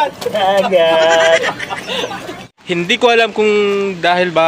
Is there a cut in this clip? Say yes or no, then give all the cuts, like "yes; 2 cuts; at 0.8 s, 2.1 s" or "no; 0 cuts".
yes; 1 cut; at 2.5 s